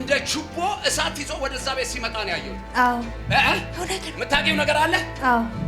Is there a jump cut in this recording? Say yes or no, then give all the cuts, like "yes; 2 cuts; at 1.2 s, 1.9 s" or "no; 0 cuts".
no; 0 cuts